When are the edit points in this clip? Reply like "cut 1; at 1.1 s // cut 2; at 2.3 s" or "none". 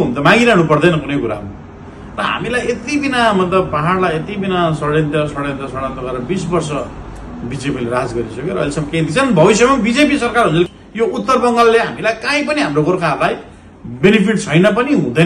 cut 1; at 10.8 s